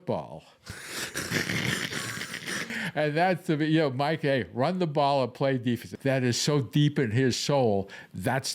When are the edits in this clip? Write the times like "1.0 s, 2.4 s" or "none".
5.9 s, 7.4 s